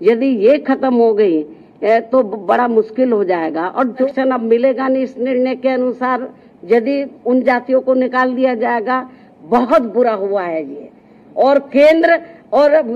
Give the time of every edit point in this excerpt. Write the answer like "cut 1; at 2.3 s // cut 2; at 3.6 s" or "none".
cut 1; at 4.1 s